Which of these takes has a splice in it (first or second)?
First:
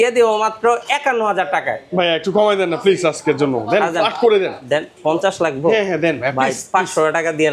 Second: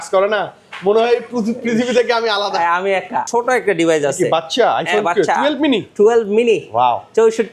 second